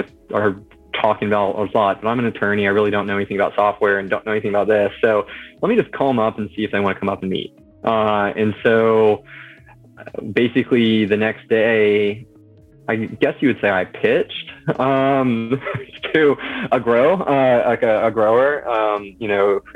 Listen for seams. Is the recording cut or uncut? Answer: uncut